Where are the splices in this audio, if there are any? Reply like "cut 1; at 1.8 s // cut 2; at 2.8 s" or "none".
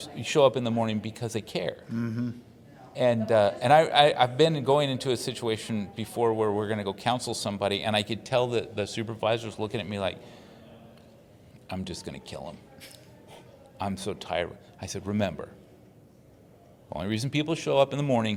none